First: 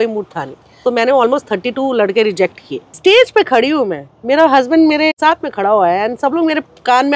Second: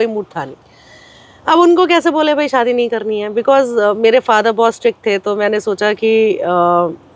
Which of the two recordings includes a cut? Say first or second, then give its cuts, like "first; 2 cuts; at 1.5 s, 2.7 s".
first; 3 cuts; at 0.8 s, 2.9 s, 5.1 s